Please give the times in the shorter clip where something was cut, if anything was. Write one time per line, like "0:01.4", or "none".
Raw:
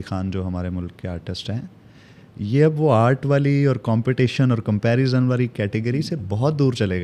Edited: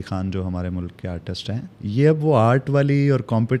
0:01.7